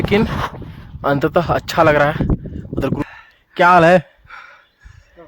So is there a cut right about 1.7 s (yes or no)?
no